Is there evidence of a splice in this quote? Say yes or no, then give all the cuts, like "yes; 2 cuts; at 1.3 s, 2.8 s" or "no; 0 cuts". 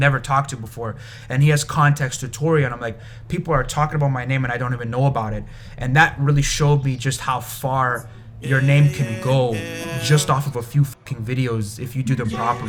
no; 0 cuts